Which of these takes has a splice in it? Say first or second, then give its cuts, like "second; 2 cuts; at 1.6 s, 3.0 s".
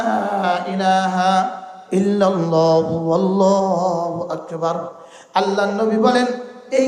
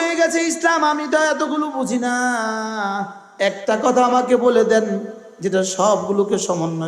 second; 1 cut; at 3.2 s